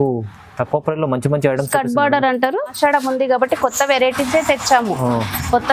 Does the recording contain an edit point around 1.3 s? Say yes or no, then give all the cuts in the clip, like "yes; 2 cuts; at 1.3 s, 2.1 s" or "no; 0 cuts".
no; 1 cut; at 2.7 s